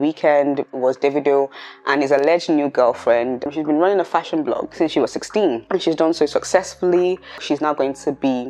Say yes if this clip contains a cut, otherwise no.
yes